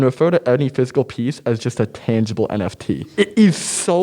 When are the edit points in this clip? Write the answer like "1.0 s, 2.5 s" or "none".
3.1 s